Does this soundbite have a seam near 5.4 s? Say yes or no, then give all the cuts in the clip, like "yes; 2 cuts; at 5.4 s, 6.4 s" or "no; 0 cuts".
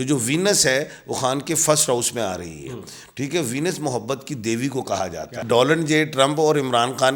yes; 1 cut; at 5.4 s